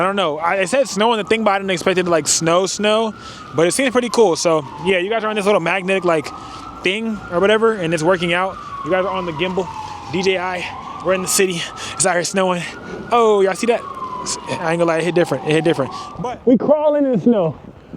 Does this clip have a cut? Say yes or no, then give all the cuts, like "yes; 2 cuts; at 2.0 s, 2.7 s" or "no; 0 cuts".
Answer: yes; 1 cut; at 16.0 s